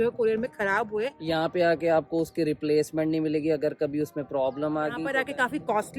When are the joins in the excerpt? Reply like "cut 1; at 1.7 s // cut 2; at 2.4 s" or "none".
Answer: cut 1; at 1.2 s // cut 2; at 5.1 s